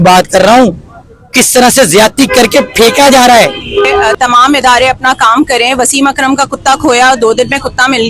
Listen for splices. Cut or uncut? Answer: cut